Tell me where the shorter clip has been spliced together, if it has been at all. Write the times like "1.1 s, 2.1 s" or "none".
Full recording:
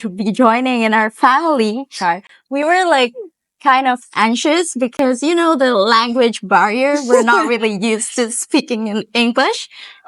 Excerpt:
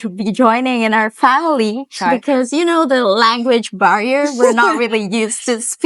2.2 s